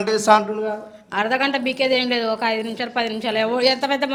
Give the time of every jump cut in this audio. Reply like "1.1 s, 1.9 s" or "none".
none

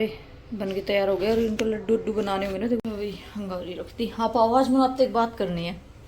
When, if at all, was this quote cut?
2.8 s

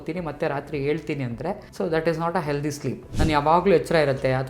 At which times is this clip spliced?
1.7 s, 3.0 s

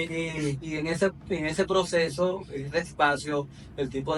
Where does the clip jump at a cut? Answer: none

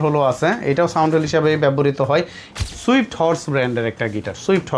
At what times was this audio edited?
2.4 s

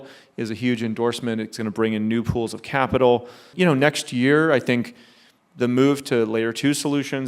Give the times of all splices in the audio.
3.5 s

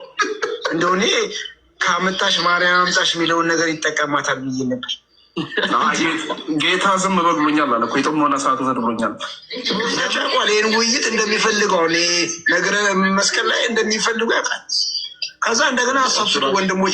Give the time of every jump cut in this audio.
10.0 s

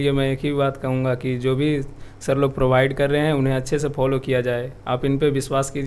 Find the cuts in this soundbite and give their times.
none

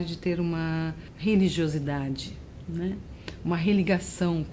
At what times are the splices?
1.1 s

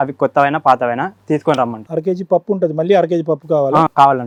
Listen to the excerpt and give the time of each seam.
none

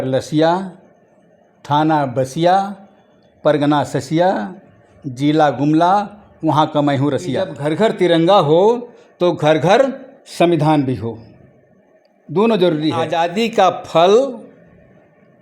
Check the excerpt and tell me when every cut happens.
7.5 s, 13.1 s

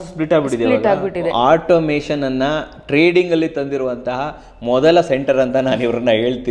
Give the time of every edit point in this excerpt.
1.2 s

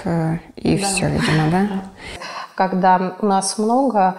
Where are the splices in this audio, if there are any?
2.3 s

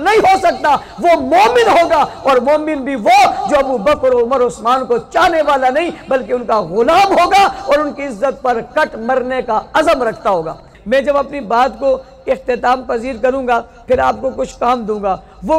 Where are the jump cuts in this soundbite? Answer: 10.7 s

